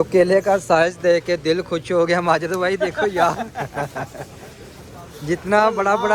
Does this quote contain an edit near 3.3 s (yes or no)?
no